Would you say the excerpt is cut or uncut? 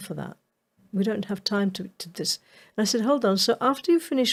uncut